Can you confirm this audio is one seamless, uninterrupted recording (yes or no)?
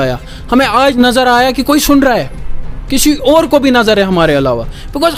yes